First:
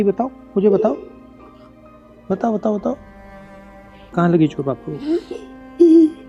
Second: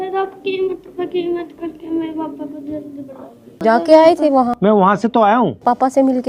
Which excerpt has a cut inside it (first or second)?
second